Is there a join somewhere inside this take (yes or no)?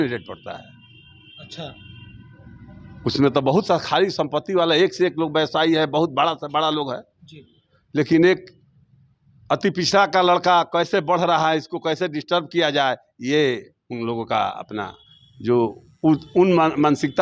no